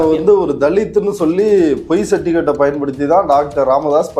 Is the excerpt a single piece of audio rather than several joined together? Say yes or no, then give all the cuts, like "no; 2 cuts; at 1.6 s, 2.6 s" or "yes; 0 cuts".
yes; 0 cuts